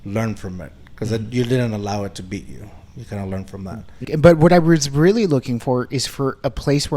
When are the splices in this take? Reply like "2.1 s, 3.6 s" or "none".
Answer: 4.0 s